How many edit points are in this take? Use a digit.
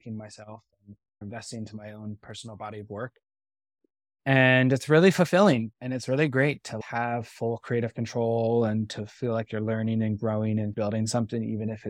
1